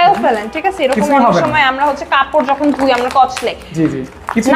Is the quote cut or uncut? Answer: uncut